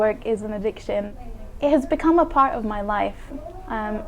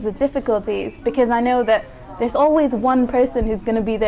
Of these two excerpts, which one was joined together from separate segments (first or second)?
first